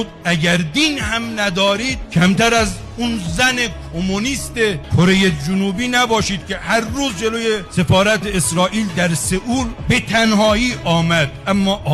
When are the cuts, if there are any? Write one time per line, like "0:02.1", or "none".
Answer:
none